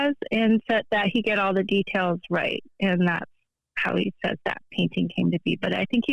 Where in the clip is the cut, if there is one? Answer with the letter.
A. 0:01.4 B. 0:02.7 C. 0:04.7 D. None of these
D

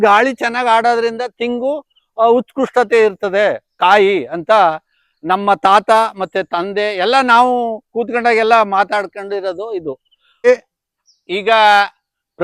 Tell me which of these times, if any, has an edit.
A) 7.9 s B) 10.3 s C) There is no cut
B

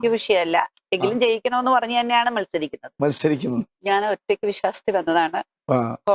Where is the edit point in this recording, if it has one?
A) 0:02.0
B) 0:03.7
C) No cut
B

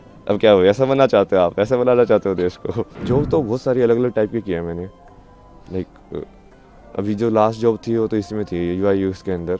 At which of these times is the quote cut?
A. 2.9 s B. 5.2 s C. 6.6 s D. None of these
A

